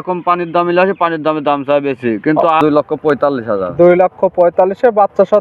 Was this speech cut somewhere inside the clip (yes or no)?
yes